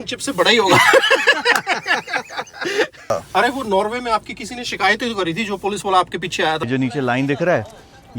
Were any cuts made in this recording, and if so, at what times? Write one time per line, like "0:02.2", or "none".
0:03.1
0:06.6